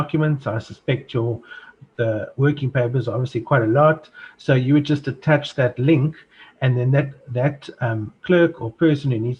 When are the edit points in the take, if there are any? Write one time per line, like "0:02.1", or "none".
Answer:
none